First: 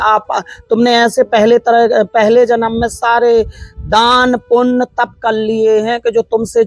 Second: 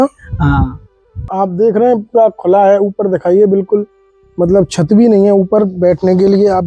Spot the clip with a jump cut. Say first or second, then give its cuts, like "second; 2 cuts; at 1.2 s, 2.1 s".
second; 1 cut; at 1.3 s